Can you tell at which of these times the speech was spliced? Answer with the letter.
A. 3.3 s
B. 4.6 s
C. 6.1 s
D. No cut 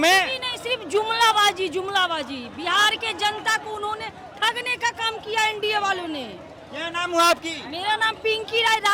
D